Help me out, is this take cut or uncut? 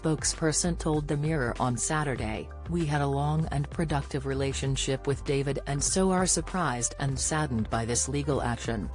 uncut